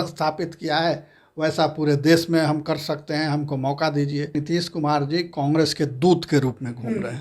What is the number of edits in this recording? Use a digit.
1